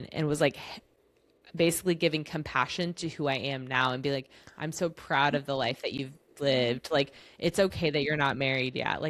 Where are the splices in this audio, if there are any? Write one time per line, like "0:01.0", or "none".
none